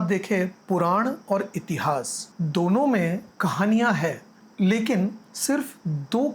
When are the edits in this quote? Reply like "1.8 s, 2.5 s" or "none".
2.2 s, 3.3 s, 5.3 s